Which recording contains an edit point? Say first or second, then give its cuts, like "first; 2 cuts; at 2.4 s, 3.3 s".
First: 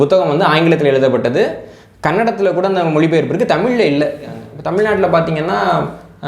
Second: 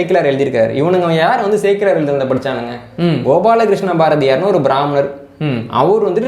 first; 1 cut; at 4.5 s